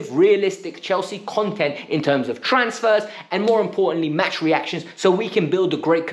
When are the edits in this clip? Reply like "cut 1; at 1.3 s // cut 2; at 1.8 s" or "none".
none